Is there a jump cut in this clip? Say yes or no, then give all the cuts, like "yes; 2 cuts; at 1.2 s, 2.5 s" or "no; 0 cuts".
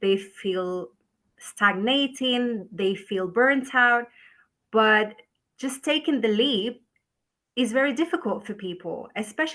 no; 0 cuts